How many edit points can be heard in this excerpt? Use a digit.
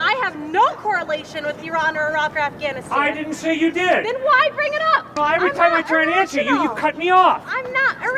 1